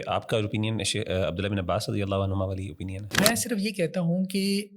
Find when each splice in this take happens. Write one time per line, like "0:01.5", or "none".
0:03.1